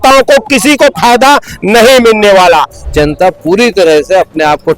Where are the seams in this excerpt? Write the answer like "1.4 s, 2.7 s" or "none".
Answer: 2.8 s